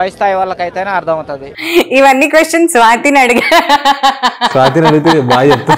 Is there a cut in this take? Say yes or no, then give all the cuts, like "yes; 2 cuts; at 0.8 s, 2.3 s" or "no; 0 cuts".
no; 0 cuts